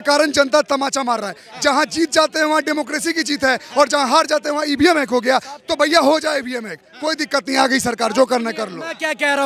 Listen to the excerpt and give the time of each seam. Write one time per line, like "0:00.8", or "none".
none